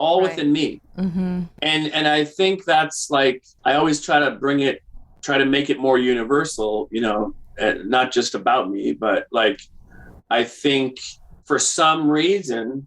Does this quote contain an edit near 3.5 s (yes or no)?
yes